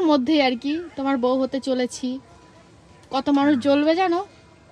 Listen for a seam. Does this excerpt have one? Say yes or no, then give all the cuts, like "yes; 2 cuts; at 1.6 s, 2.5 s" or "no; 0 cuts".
no; 0 cuts